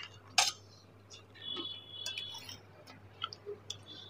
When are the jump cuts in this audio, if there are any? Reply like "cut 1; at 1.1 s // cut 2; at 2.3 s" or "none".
cut 1; at 2.4 s